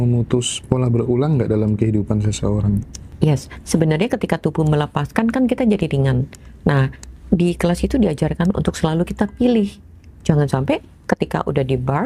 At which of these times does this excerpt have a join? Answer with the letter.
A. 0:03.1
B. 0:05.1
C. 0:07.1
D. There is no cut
A